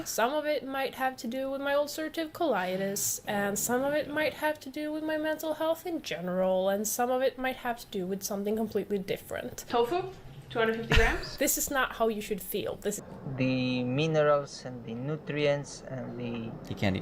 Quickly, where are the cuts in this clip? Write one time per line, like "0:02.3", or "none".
0:13.0